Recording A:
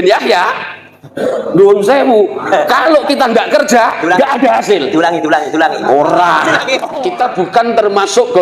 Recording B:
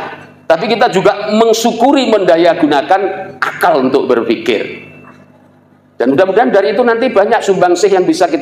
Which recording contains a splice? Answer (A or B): A